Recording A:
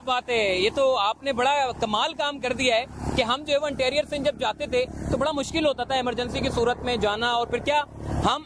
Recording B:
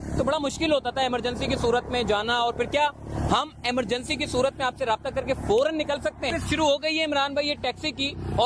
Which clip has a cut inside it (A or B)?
B